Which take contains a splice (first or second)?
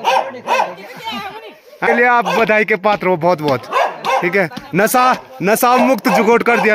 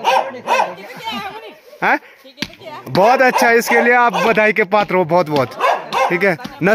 first